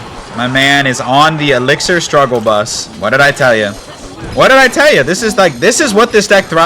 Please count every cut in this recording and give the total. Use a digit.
1